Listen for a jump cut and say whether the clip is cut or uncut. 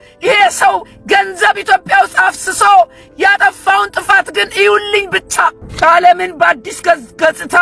cut